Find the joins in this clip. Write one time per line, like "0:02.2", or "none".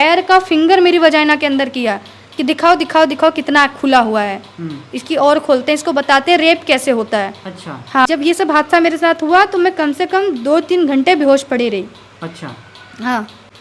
0:08.1